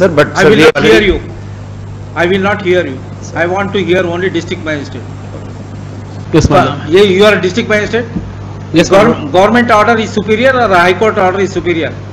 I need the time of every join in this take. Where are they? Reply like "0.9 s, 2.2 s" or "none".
6.2 s

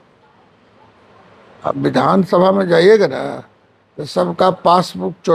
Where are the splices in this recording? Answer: none

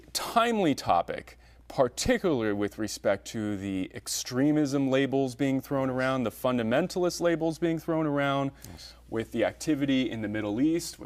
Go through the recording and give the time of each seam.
none

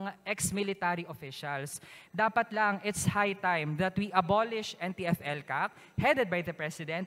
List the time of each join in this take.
2.0 s

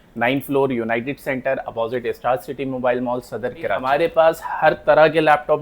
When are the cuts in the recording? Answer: 3.8 s

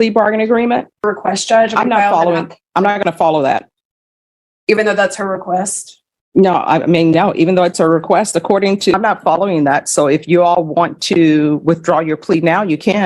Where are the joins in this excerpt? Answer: 1.0 s, 8.9 s

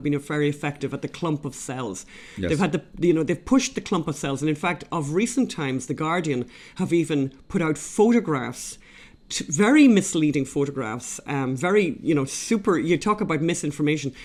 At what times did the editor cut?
none

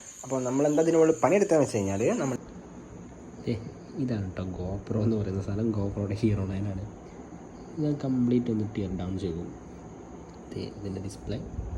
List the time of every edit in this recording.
2.3 s

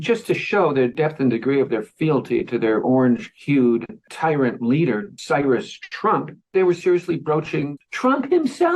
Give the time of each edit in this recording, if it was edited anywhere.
3.3 s, 7.7 s

